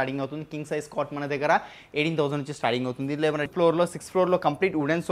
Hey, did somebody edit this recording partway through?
yes; 1 cut; at 3.5 s

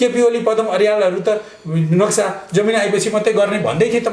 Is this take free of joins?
yes; 0 cuts

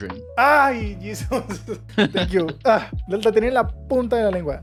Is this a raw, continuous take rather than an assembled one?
yes; 0 cuts

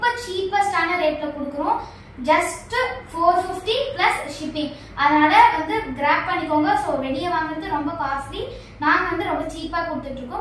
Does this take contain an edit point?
no; 0 cuts

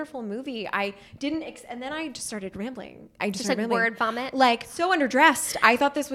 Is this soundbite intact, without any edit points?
no; 2 cuts; at 3.2 s, 4.7 s

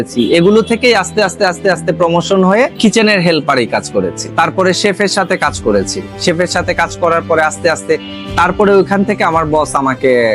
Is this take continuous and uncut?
yes; 0 cuts

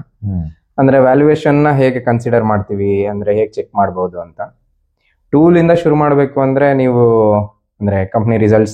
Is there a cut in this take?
no; 0 cuts

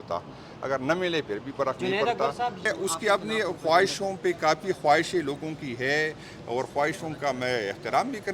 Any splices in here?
yes; 1 cut; at 2.7 s

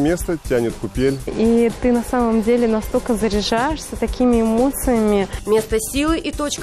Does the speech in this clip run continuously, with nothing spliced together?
yes; 0 cuts

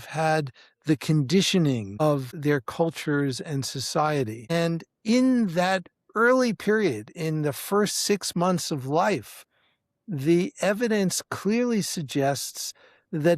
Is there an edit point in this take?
yes; 1 cut; at 1.9 s

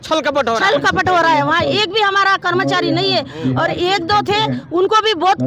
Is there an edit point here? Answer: no; 0 cuts

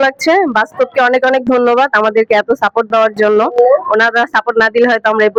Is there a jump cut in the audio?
no; 0 cuts

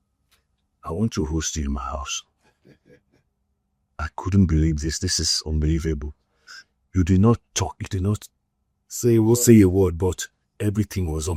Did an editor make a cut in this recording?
no; 0 cuts

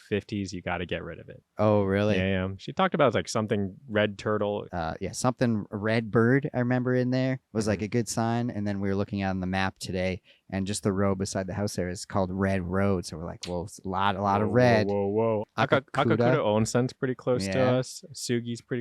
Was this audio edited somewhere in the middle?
yes; 3 cuts; at 1.4 s, 4.7 s, 15.5 s

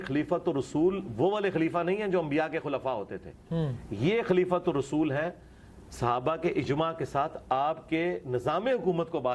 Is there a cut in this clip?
no; 0 cuts

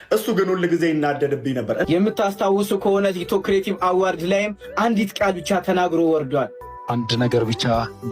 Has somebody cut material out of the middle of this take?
yes; 2 cuts; at 1.9 s, 6.6 s

